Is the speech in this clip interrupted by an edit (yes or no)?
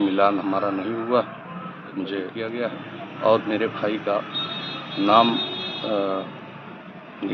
yes